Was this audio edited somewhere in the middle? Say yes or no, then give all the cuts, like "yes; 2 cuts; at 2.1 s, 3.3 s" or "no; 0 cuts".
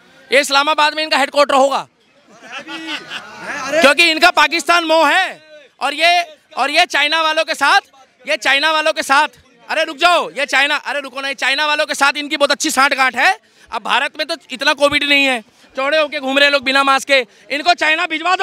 no; 0 cuts